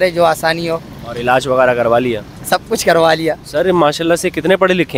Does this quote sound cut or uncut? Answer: cut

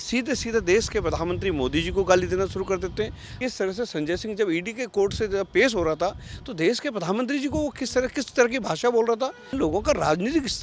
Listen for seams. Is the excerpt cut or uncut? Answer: cut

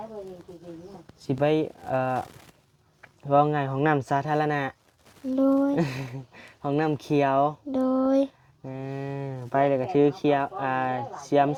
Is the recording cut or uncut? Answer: uncut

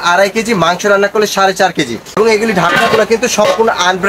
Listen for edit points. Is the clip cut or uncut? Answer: cut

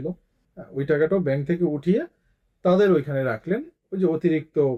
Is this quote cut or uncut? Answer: uncut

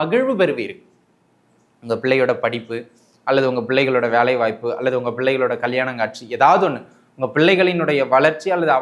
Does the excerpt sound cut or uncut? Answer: uncut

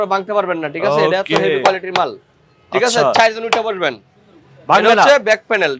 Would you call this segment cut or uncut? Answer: uncut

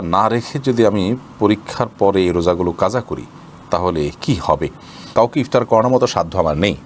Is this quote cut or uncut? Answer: cut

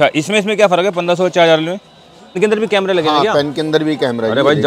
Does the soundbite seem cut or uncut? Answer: cut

